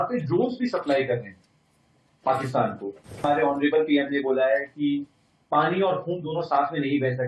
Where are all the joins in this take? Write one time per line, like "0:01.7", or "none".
0:03.2